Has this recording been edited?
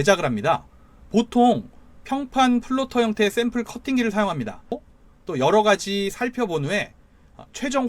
yes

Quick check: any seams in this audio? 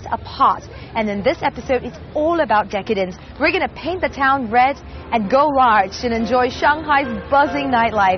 no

